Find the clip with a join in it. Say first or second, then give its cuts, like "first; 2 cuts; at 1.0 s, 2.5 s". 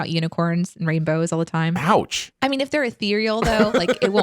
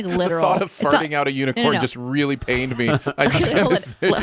first; 1 cut; at 2.2 s